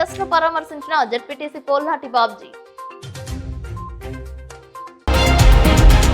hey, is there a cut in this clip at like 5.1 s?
yes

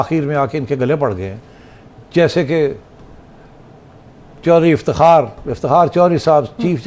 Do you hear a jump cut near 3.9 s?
no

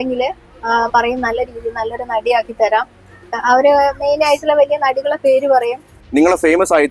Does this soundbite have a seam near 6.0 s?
yes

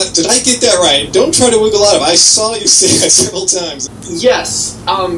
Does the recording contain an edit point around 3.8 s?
yes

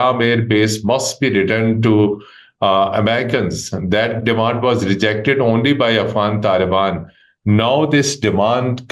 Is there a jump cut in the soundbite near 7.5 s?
no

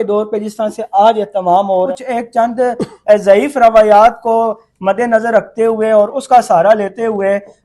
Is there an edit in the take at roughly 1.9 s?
yes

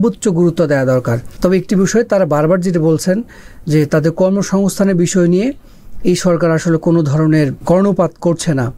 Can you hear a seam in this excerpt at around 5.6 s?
no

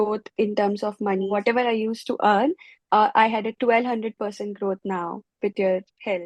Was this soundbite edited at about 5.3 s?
no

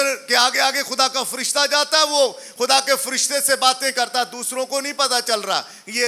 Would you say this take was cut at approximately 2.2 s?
no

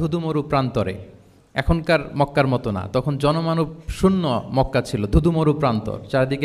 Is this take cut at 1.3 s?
no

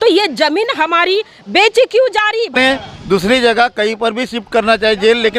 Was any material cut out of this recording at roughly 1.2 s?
no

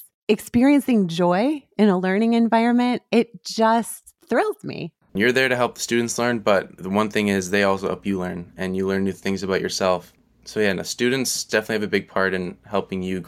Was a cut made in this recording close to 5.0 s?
yes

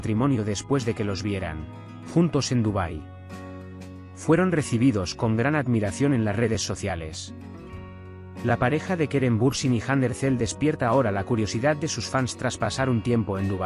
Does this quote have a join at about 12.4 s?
no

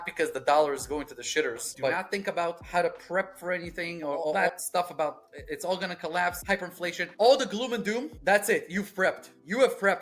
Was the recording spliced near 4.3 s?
yes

